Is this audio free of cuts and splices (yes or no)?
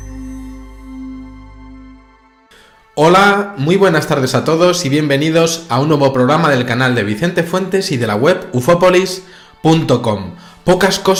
yes